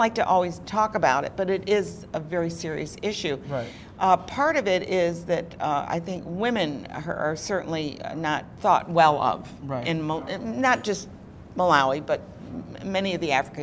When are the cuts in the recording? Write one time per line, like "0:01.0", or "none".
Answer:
0:12.0